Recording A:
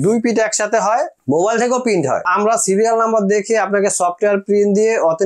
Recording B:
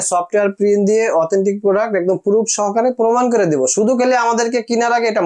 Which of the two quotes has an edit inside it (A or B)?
A